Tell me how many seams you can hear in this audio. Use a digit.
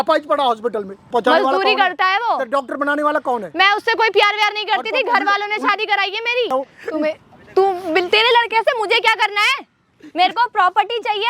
2